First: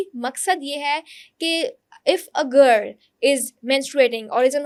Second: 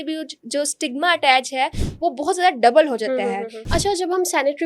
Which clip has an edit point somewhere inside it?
second; 1 cut; at 3.5 s

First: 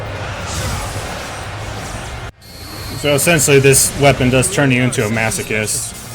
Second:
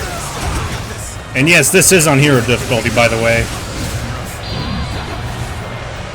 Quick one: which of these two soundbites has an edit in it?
first; 1 cut; at 2.3 s

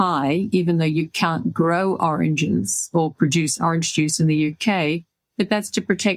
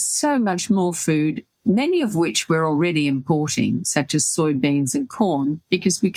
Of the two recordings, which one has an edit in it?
first; 1 cut; at 5.2 s

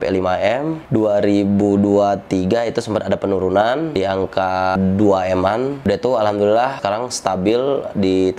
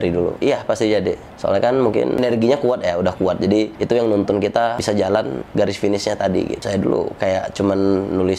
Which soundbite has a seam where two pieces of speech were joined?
second; 1 cut; at 6.6 s

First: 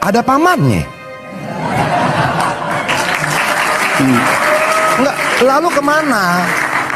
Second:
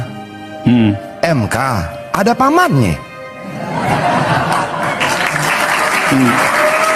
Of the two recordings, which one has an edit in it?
first; 1 cut; at 6.0 s

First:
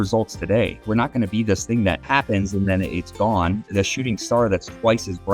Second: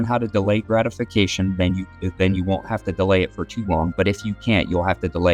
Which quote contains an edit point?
first; 2 cuts; at 0.8 s, 2.0 s

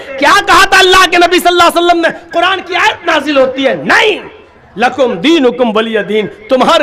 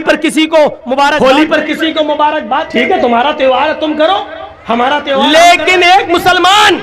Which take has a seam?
second; 3 cuts; at 1.2 s, 2.7 s, 5.3 s

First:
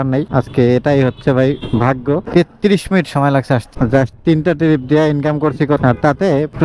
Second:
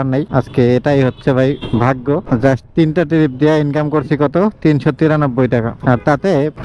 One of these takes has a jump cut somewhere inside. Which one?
first; 3 cuts; at 2.2 s, 3.7 s, 5.8 s

